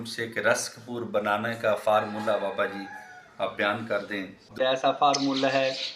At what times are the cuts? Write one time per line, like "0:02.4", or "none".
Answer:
0:04.6